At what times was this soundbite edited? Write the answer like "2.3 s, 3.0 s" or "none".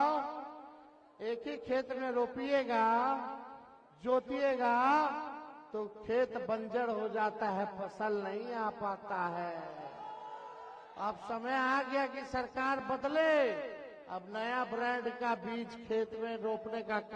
none